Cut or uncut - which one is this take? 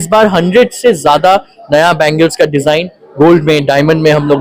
uncut